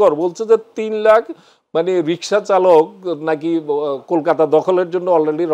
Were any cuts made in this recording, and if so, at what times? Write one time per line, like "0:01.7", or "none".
none

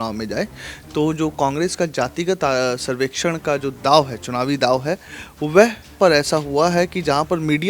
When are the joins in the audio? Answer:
0:05.9

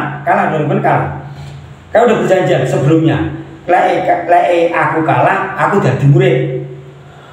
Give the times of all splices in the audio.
none

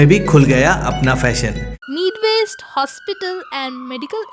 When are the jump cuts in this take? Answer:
0:01.7

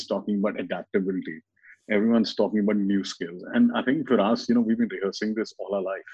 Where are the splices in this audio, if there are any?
none

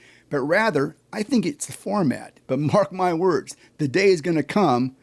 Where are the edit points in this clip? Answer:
0:02.3

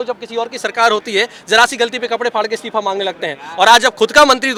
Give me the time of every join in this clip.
none

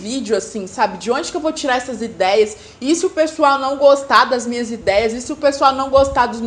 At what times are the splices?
none

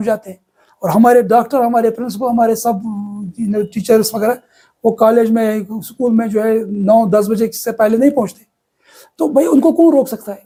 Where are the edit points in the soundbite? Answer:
none

